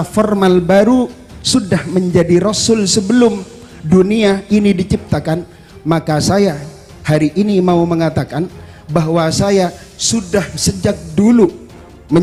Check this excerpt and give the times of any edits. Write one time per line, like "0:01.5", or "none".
none